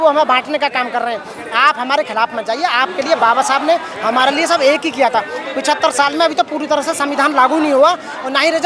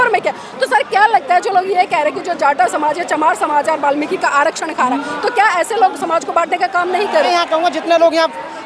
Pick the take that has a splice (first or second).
second